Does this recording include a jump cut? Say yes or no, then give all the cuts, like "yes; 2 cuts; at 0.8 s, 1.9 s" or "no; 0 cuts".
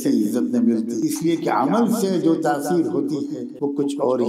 yes; 2 cuts; at 0.9 s, 3.4 s